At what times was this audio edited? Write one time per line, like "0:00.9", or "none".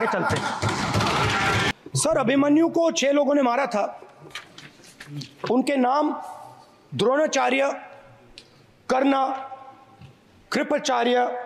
0:01.7